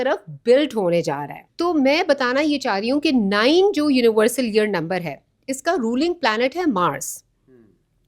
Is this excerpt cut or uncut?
uncut